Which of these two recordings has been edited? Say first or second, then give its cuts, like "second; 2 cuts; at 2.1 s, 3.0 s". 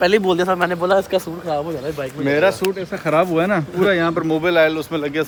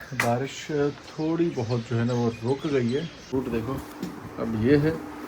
second; 1 cut; at 3.2 s